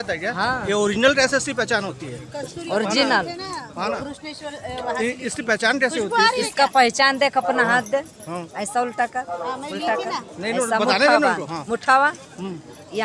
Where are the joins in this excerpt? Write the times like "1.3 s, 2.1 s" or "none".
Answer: none